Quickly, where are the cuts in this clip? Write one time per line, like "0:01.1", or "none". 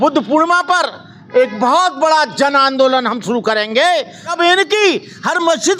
0:04.2